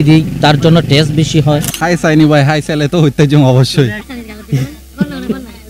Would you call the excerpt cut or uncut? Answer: cut